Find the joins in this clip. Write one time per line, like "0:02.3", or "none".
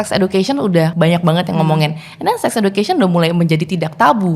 0:00.9